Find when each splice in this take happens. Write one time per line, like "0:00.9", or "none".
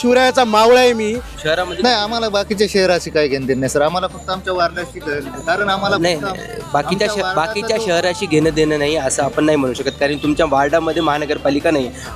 0:01.3